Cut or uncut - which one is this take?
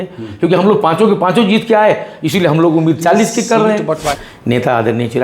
cut